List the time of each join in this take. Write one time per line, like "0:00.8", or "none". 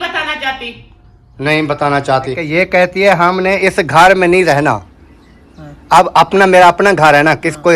0:02.4